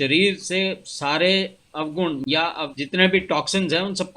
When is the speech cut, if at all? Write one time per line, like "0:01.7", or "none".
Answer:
0:02.8